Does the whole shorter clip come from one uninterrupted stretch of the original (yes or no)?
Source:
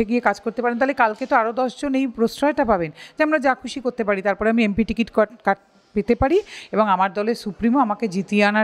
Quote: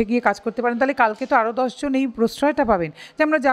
yes